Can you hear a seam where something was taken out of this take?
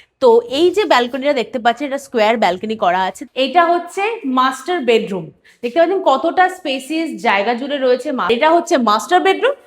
yes; 2 cuts; at 3.2 s, 8.2 s

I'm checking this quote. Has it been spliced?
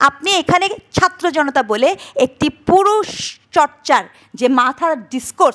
no; 0 cuts

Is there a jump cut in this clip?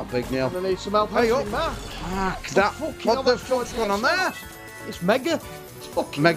no; 0 cuts

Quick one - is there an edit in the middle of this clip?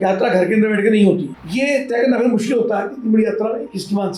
yes; 1 cut; at 1.3 s

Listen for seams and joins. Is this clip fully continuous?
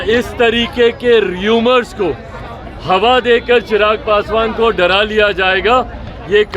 yes; 0 cuts

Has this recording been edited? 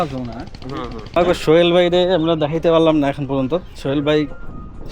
yes; 1 cut; at 1.0 s

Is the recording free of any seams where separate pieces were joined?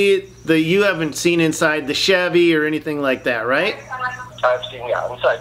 no; 1 cut; at 4.3 s

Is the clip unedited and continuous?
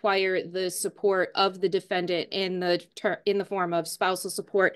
yes; 0 cuts

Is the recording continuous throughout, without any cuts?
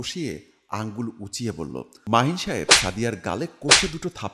no; 1 cut; at 1.9 s

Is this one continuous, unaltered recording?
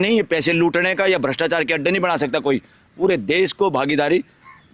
yes; 0 cuts

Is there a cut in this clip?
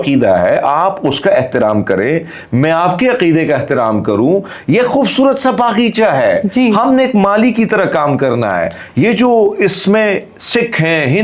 no; 0 cuts

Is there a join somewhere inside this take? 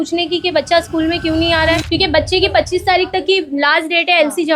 yes; 1 cut; at 1.8 s

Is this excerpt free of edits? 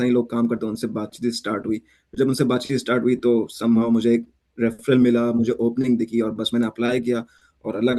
yes; 0 cuts

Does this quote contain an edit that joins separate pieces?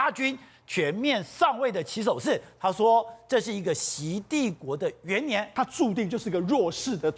yes; 1 cut; at 5.5 s

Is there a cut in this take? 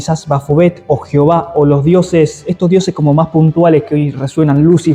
no; 0 cuts

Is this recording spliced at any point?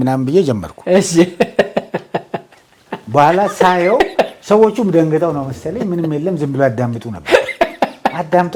no; 0 cuts

